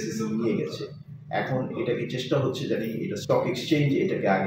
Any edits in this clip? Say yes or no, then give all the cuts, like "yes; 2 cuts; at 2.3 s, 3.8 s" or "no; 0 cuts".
no; 0 cuts